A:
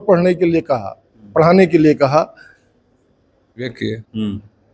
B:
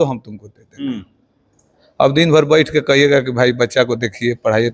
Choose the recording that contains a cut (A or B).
A